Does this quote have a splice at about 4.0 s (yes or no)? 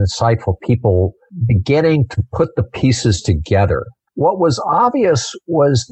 yes